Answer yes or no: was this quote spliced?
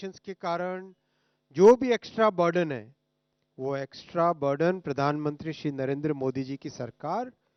no